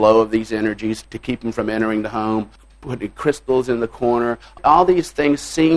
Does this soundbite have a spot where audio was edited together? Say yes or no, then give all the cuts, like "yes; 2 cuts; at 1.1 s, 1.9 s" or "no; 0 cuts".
yes; 3 cuts; at 1.0 s, 2.6 s, 4.6 s